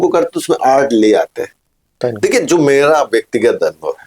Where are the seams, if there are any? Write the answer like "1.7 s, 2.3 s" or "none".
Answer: 2.0 s